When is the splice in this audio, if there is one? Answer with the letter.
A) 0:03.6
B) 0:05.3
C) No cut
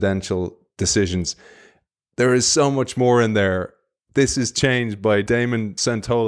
B